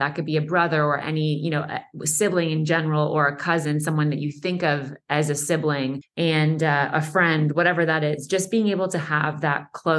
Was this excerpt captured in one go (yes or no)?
no